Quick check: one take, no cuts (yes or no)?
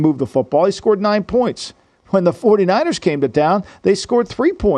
yes